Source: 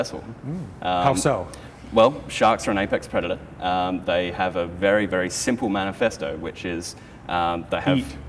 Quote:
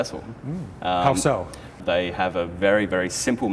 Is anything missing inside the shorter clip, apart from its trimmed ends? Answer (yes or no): yes